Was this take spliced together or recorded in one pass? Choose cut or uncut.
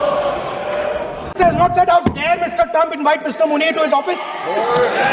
uncut